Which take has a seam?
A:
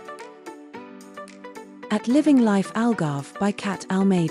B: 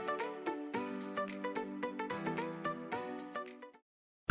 A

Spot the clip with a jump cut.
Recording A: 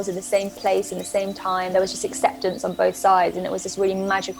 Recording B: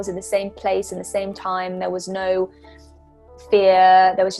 A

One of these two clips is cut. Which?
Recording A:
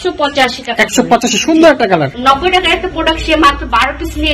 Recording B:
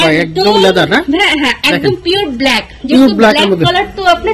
A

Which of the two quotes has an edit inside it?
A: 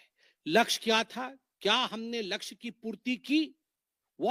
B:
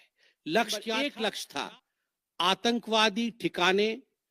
B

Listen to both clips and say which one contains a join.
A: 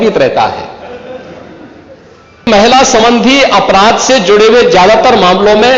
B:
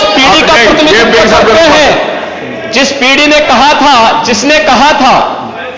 A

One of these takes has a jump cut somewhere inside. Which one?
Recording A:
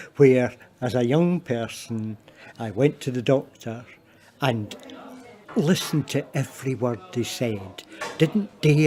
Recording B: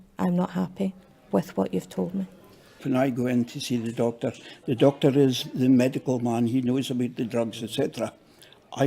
B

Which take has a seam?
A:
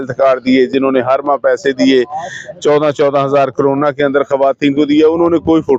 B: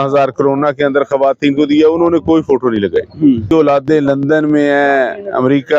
B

